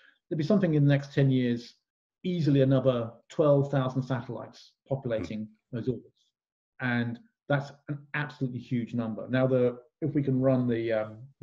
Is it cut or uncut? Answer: uncut